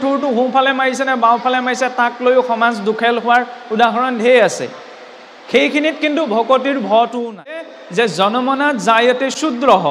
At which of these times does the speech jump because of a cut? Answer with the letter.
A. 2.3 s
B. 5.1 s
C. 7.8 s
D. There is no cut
C